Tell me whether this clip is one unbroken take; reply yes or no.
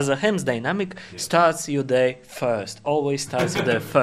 yes